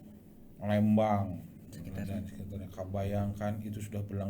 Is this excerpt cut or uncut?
cut